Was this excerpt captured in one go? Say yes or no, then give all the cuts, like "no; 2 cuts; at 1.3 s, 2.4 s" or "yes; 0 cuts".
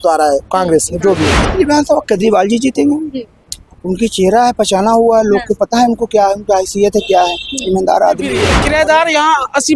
no; 2 cuts; at 1.4 s, 8.5 s